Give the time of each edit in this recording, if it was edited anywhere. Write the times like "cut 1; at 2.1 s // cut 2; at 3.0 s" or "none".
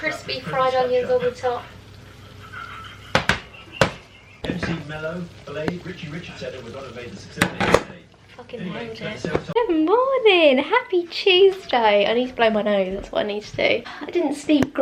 none